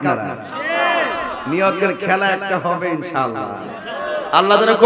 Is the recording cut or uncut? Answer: uncut